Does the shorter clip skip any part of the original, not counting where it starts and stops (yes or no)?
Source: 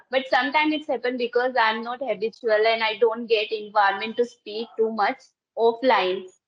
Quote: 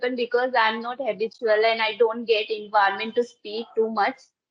no